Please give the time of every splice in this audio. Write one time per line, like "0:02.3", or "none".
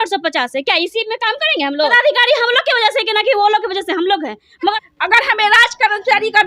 0:01.9
0:04.8